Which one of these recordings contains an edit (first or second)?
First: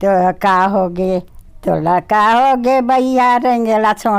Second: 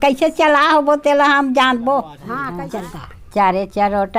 second